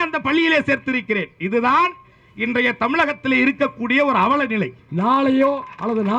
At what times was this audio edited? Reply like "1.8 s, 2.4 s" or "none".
4.8 s